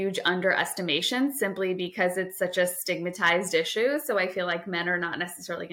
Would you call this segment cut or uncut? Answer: uncut